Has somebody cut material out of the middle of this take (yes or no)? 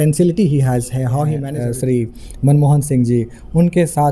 yes